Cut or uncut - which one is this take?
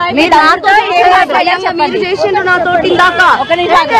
cut